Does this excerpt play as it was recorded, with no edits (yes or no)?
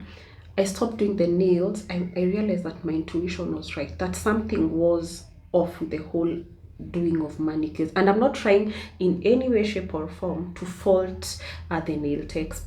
yes